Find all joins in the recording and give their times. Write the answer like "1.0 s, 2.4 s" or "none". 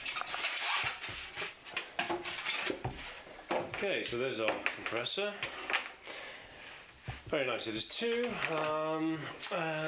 1.1 s